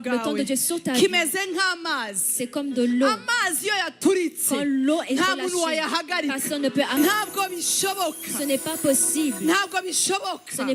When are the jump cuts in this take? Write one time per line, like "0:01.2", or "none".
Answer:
0:07.0

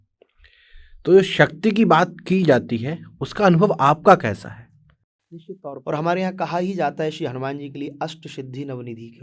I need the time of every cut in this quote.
0:05.8

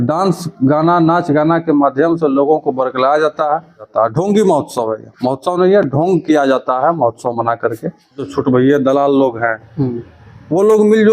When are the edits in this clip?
0:03.9
0:08.3

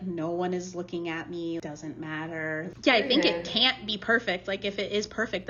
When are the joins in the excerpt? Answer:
0:01.6
0:02.7

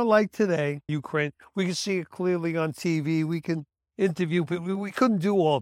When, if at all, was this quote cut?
0:01.0

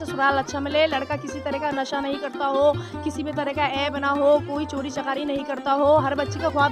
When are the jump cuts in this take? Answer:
none

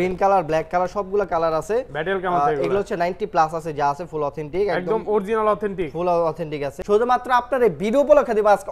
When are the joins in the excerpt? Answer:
0:06.7

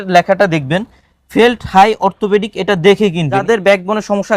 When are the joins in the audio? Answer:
0:03.4

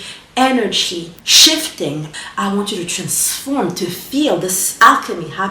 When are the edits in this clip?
0:01.2
0:02.1

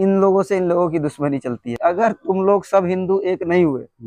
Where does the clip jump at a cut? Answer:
0:01.7

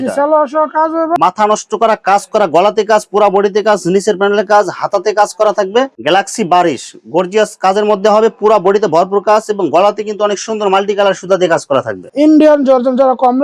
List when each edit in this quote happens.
0:01.1
0:05.9
0:12.1

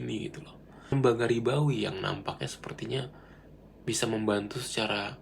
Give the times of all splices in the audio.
0:00.9

